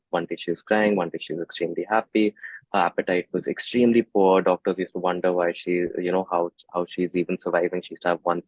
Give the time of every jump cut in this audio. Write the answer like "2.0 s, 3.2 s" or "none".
none